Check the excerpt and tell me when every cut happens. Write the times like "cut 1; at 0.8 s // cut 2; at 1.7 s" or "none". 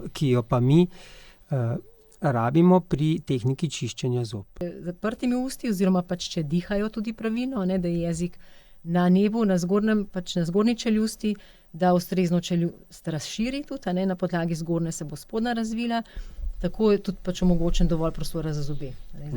cut 1; at 4.7 s